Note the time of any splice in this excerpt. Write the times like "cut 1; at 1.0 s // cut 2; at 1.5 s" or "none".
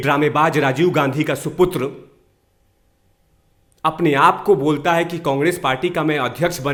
none